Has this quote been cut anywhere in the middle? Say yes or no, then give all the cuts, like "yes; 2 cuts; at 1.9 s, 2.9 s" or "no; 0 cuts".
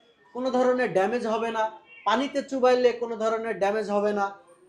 no; 0 cuts